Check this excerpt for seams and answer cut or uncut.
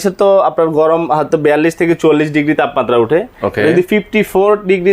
uncut